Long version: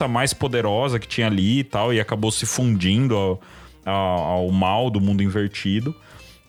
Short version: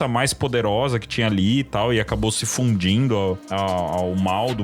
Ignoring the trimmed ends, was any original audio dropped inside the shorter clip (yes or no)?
yes